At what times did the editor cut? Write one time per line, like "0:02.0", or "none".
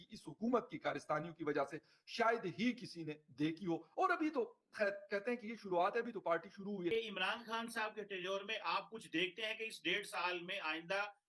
0:06.9